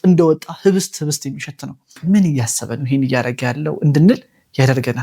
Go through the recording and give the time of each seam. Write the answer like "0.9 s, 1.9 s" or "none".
1.9 s